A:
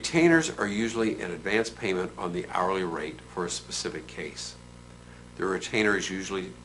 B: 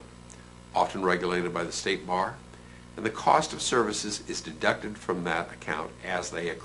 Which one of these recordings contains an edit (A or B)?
A